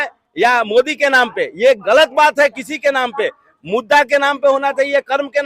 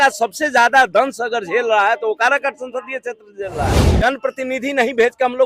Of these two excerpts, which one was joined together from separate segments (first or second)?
second